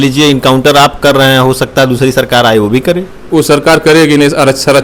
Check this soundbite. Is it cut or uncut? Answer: uncut